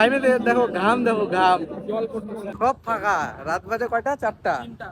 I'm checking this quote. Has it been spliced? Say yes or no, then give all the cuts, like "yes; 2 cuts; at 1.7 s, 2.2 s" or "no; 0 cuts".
yes; 1 cut; at 2.4 s